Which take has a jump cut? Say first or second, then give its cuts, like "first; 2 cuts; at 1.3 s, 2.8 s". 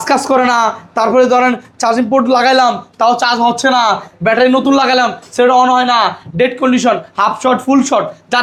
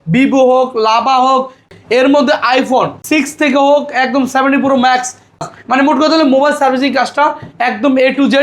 second; 3 cuts; at 1.7 s, 3.0 s, 5.4 s